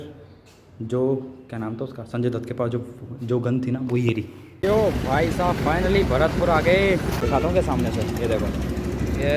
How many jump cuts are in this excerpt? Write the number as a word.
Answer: two